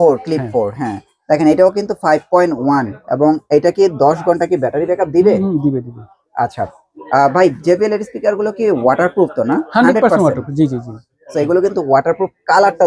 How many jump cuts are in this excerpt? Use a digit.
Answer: 0